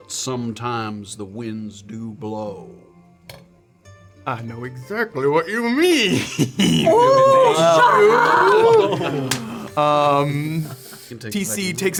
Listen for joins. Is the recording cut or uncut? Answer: uncut